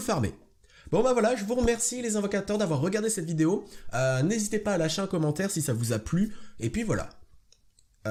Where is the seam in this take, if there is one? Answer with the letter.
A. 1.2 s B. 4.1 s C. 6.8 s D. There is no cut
D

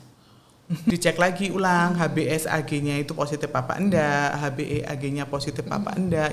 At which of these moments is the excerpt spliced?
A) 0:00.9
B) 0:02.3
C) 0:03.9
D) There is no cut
A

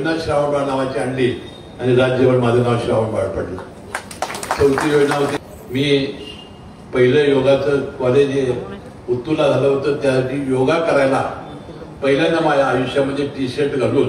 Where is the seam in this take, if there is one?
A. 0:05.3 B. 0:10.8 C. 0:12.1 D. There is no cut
A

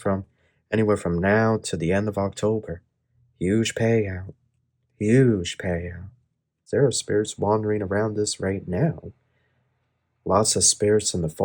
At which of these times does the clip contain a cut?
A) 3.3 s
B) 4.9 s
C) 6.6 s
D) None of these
C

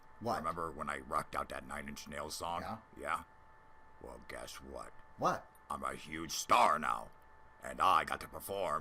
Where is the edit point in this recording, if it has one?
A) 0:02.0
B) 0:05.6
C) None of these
A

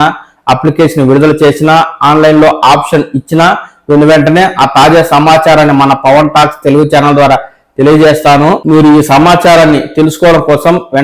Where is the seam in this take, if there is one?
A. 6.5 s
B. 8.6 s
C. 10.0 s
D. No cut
B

